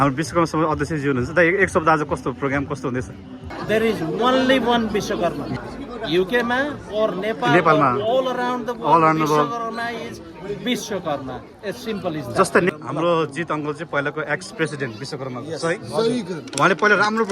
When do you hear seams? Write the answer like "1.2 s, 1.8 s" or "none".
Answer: 3.5 s, 5.5 s, 12.7 s